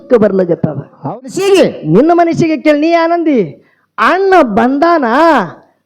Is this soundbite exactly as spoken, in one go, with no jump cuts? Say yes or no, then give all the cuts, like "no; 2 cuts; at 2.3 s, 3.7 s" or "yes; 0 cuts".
no; 1 cut; at 1.0 s